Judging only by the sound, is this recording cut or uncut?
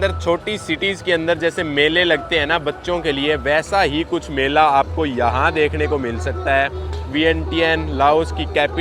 uncut